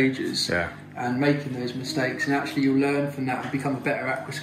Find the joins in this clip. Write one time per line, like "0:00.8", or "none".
none